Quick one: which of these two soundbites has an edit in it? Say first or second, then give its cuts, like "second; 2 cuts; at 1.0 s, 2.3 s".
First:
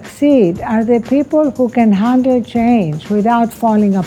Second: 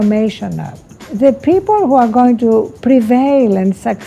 second; 2 cuts; at 1.1 s, 2.7 s